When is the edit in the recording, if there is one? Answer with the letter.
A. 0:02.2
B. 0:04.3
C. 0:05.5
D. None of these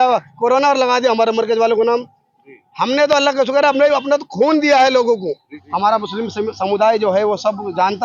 C